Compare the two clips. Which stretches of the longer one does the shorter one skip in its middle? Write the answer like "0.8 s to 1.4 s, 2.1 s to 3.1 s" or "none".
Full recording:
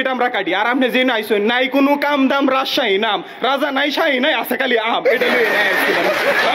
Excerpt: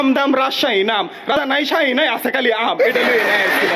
3.5 s to 3.6 s